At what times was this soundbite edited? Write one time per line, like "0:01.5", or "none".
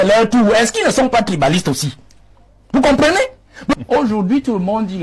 0:03.7